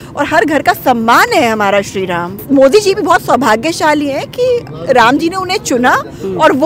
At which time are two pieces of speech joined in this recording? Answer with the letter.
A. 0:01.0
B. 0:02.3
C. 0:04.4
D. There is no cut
B